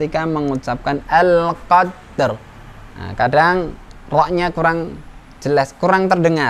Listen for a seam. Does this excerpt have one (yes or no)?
no